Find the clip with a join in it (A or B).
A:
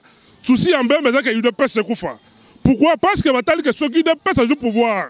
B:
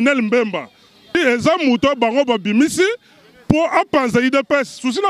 B